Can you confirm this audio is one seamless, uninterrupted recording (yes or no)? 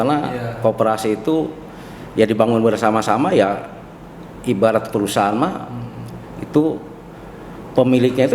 yes